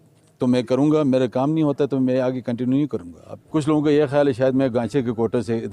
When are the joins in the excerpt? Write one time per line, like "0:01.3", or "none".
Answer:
0:03.3

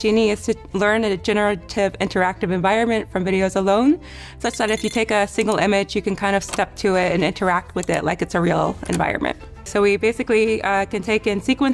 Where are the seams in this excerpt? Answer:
0:09.7

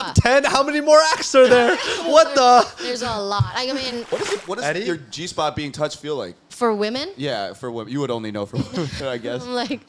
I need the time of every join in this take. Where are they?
0:04.1
0:06.4

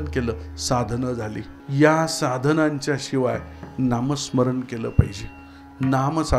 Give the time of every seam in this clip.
0:01.5

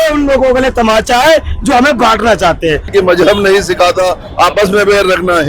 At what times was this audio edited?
0:02.9

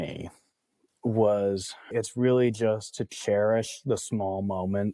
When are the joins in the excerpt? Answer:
0:01.9

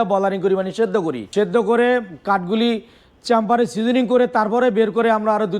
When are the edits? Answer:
0:01.2

